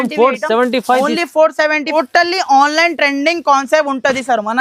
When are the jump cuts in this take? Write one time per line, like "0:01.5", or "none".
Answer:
0:01.9